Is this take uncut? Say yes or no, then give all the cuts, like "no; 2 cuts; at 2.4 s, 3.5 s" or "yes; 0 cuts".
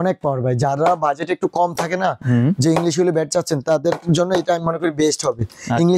yes; 0 cuts